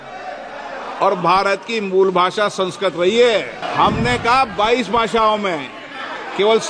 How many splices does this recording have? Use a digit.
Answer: 1